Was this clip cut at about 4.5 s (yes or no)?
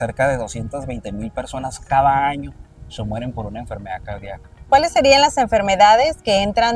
yes